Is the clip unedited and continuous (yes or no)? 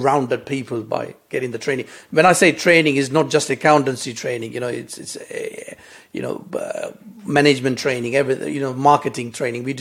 yes